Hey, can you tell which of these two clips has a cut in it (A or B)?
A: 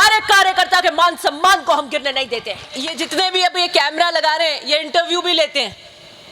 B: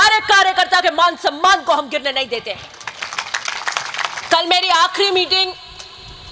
A